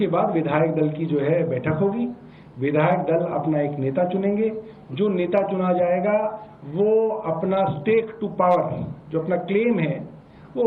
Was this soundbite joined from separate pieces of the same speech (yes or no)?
no